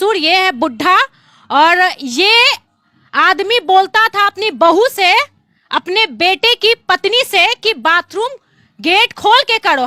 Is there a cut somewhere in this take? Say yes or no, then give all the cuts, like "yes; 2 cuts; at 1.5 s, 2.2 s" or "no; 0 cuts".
no; 0 cuts